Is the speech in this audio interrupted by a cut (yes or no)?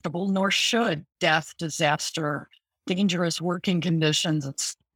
no